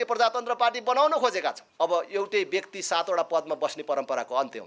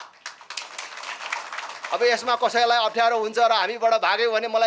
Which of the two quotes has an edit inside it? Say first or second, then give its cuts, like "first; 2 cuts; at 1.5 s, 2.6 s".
first; 1 cut; at 1.6 s